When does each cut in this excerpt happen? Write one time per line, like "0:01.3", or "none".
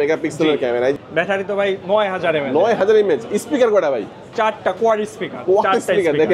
0:01.0